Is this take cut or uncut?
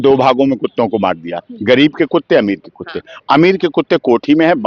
uncut